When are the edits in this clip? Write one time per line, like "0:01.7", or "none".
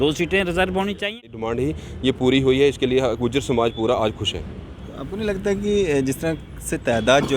0:01.4

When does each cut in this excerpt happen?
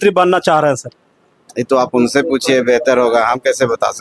none

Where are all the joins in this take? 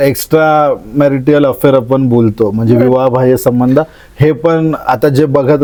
none

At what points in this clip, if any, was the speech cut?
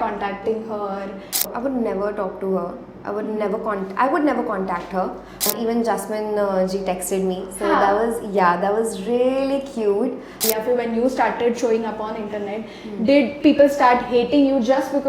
0:01.5
0:05.5
0:10.3

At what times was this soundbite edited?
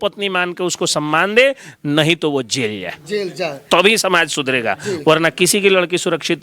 none

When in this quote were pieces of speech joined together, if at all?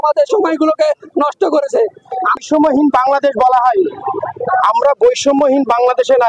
0:02.4

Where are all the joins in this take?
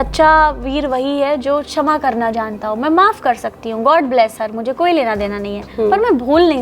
none

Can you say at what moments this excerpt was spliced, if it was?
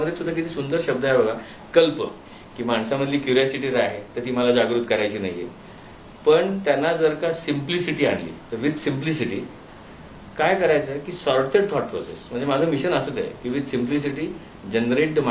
0:02.2

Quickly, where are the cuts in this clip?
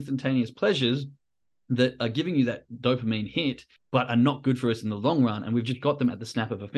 0:03.7

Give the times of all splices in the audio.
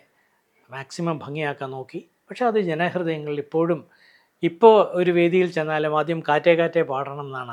none

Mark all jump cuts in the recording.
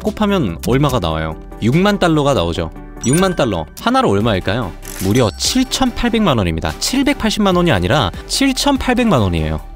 none

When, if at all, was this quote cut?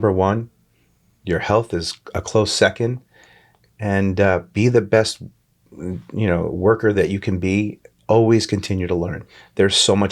none

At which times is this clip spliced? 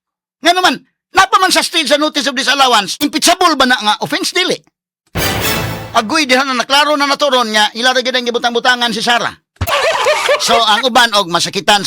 0:02.9
0:09.7

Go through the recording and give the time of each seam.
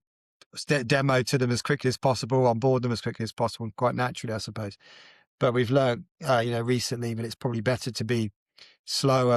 none

